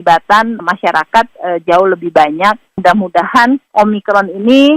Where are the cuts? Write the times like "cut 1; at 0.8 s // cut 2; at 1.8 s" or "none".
cut 1; at 2.7 s // cut 2; at 3.6 s